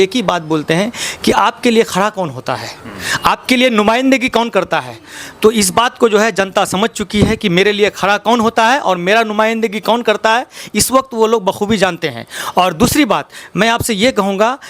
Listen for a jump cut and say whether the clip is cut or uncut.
uncut